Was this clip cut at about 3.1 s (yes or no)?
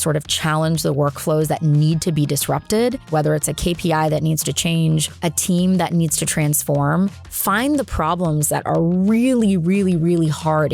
yes